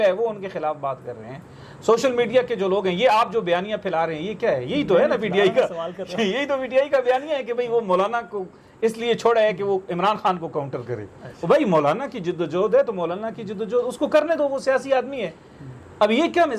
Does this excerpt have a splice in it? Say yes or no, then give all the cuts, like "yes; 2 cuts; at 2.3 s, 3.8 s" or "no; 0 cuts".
no; 0 cuts